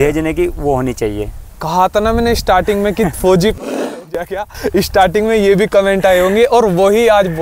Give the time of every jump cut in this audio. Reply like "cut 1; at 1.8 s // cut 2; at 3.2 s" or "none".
cut 1; at 1.4 s